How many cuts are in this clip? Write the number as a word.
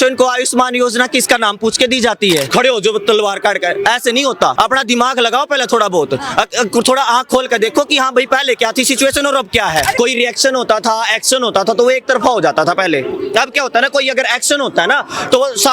three